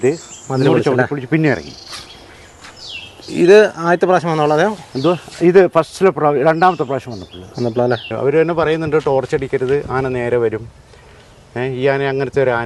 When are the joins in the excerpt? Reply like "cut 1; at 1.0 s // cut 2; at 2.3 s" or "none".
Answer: cut 1; at 8.1 s